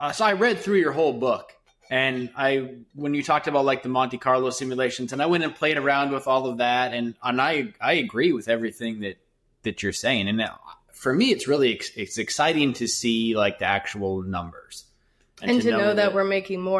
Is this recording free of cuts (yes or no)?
yes